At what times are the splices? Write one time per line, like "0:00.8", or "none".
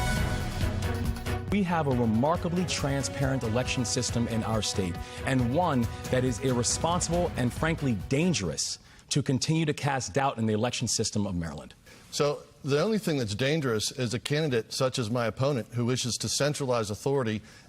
0:01.4